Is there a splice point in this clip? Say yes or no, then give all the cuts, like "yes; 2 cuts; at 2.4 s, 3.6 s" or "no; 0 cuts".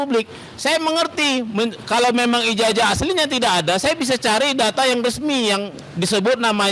no; 0 cuts